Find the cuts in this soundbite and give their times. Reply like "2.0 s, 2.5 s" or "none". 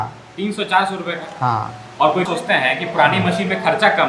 2.3 s